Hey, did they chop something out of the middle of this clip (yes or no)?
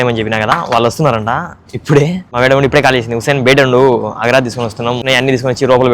yes